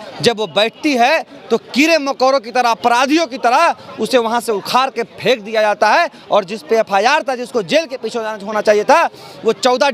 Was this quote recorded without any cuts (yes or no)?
yes